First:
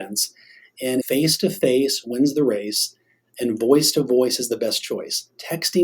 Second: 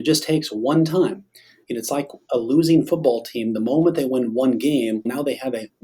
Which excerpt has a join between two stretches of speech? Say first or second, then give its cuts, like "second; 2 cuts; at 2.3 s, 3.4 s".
first; 1 cut; at 1.0 s